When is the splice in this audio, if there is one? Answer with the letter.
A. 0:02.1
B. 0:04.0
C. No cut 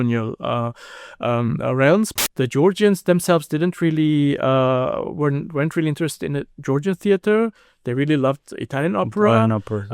A